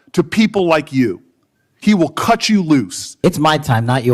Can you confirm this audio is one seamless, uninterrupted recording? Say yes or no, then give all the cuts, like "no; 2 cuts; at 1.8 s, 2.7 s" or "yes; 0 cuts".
no; 1 cut; at 3.1 s